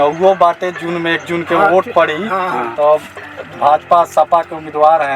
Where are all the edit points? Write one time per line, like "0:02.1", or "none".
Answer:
none